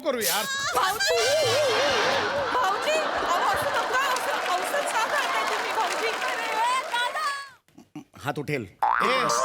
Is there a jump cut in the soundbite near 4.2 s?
no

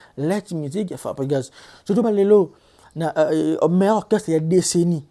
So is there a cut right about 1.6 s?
no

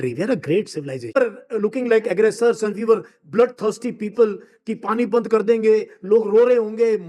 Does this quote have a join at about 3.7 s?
no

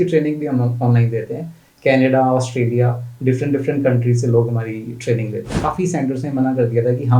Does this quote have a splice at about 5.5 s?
yes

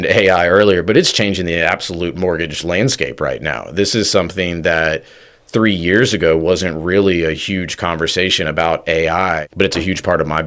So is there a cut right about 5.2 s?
no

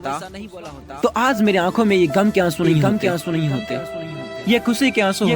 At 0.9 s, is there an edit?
yes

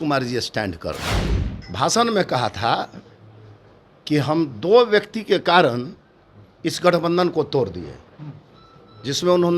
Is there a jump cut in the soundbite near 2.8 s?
no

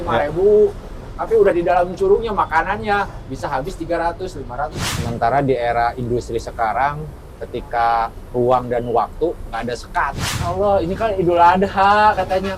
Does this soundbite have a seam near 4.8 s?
yes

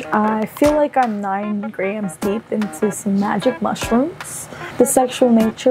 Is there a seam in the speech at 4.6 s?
yes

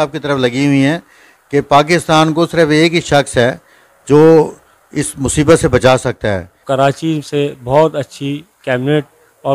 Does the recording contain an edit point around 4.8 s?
no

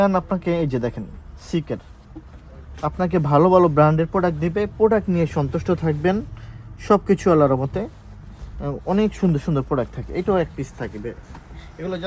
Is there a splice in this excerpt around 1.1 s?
no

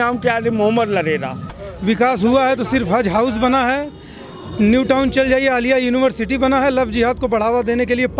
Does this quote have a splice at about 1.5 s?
yes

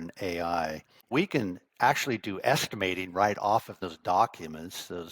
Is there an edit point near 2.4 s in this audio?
no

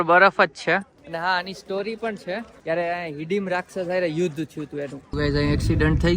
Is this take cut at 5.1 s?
yes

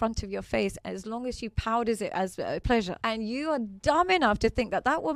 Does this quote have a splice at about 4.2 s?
no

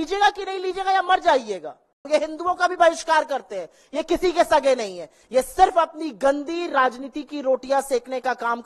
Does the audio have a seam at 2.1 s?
yes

